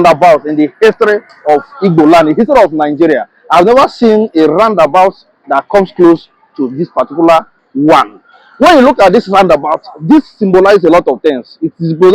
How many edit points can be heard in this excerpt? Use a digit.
0